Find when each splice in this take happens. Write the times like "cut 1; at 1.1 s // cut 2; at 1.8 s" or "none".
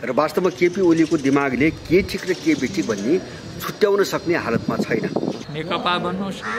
cut 1; at 5.5 s